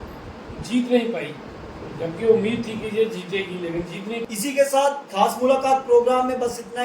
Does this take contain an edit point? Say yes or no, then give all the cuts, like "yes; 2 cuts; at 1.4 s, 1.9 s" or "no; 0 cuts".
yes; 1 cut; at 4.2 s